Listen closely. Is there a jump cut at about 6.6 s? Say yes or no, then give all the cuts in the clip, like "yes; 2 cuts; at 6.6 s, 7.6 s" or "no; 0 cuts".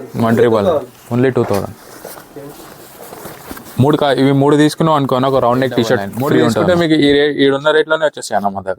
yes; 1 cut; at 6.6 s